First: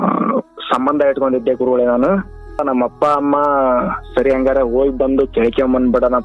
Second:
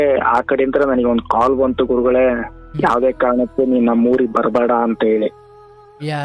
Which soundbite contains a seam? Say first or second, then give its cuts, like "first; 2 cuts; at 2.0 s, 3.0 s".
first; 1 cut; at 2.6 s